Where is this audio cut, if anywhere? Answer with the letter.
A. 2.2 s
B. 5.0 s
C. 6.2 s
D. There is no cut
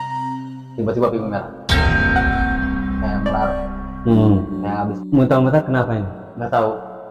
B